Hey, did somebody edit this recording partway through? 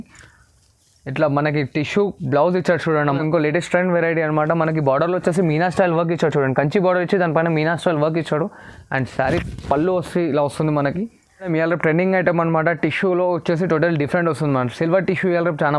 yes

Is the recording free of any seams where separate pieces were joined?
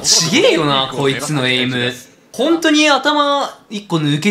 yes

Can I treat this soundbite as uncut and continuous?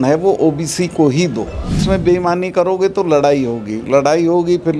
no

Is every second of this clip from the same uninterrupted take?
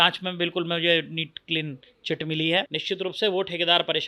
no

